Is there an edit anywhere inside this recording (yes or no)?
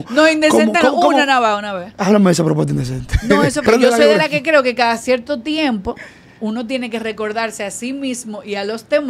yes